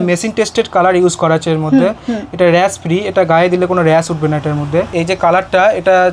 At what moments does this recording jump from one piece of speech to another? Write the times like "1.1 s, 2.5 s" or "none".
4.9 s